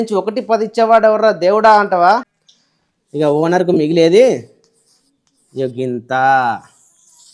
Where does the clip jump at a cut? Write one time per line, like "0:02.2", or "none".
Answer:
0:02.3

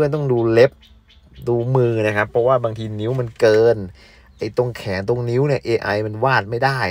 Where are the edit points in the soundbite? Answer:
none

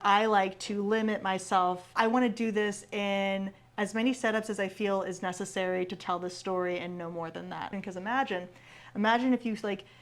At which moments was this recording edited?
0:01.9
0:07.7

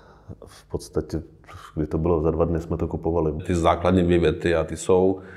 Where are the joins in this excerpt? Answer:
0:03.4

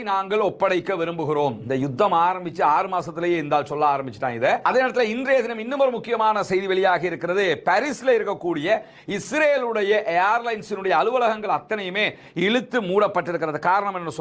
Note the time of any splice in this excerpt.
0:04.6

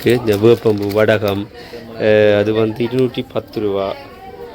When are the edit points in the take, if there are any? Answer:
none

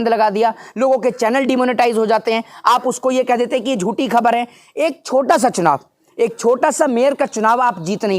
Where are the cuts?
none

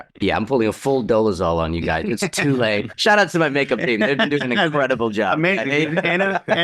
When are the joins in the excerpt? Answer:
0:02.9

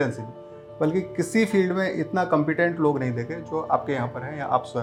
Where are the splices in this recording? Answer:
none

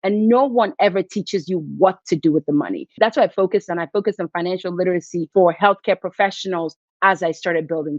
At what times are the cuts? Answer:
0:02.9

